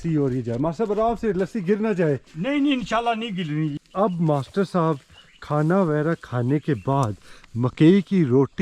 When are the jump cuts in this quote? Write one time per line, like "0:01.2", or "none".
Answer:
0:03.8